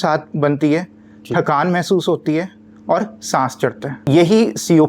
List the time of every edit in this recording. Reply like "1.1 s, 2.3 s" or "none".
4.0 s

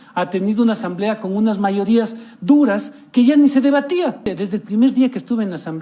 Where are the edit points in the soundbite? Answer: 4.3 s

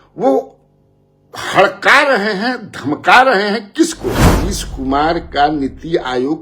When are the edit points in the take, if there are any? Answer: 4.3 s

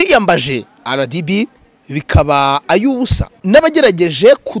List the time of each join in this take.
3.3 s

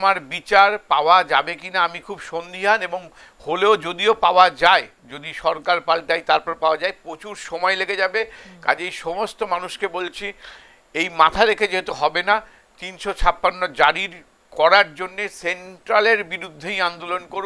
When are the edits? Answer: none

